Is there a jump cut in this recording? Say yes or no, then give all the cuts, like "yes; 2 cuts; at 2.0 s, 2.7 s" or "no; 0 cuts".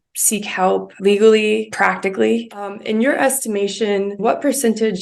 yes; 4 cuts; at 0.9 s, 1.7 s, 2.8 s, 4.2 s